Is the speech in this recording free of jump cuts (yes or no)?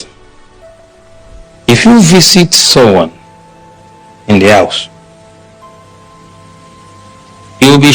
no